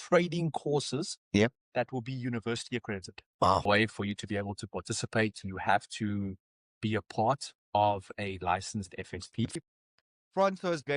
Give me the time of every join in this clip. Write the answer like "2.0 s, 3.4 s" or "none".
3.7 s, 9.6 s